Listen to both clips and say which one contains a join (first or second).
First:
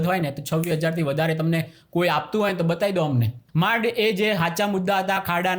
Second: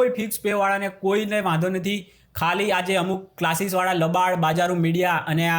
first